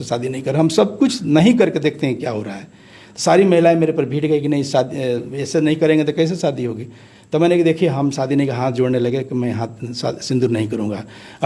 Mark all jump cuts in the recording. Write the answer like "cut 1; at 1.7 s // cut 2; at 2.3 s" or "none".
none